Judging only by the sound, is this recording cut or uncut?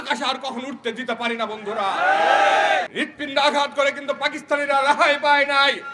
cut